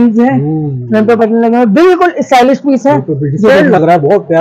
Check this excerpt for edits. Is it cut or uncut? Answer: uncut